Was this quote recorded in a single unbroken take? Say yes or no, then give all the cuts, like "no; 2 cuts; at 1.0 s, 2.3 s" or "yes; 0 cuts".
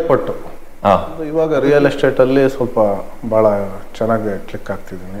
no; 1 cut; at 1.2 s